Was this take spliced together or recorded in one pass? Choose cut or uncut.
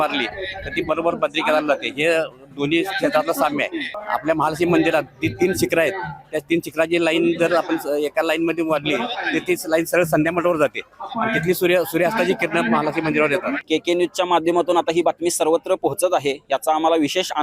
cut